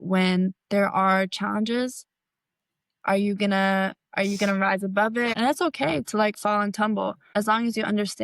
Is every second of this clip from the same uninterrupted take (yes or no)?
no